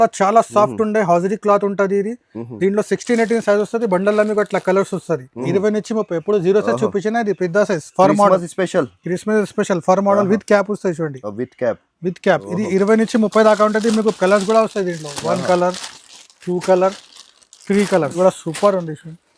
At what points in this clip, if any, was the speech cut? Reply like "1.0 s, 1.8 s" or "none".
5.3 s, 18.2 s